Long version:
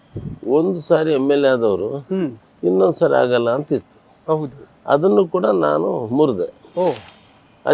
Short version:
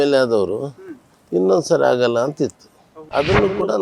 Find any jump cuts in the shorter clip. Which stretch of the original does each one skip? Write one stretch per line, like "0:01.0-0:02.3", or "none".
0:04.1-0:04.5